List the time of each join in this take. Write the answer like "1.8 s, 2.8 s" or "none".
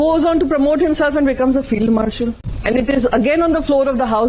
2.8 s